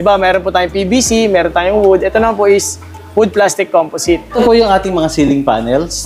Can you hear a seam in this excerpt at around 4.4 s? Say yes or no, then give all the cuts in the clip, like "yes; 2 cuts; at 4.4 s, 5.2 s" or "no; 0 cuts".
yes; 1 cut; at 4.4 s